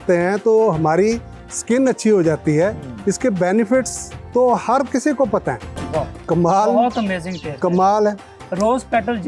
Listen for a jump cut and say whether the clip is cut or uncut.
cut